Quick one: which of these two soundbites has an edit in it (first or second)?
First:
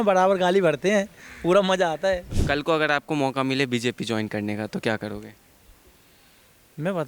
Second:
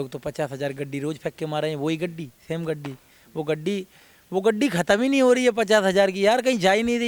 first